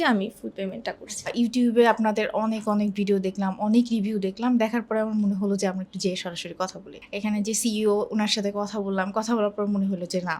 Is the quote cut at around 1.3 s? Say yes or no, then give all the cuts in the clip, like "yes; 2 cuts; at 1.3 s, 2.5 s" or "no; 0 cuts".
yes; 2 cuts; at 1.3 s, 7.0 s